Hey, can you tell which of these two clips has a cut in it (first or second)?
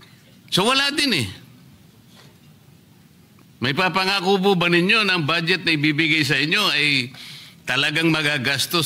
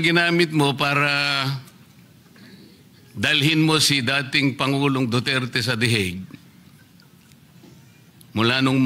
first